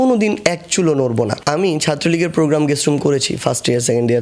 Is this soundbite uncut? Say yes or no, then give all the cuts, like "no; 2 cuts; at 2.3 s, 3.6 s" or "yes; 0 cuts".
no; 1 cut; at 1.4 s